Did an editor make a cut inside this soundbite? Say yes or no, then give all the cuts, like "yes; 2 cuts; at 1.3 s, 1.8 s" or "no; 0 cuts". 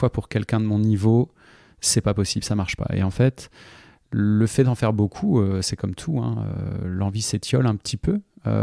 no; 0 cuts